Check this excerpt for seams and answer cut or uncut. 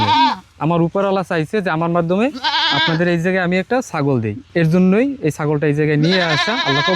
cut